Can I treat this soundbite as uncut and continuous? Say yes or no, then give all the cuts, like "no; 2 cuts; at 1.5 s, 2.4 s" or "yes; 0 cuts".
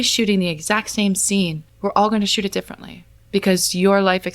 no; 1 cut; at 1.6 s